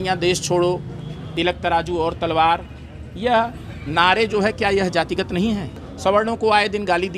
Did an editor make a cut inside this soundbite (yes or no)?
yes